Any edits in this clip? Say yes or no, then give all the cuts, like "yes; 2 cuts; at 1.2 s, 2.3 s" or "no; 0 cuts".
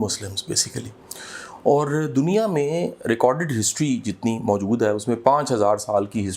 no; 0 cuts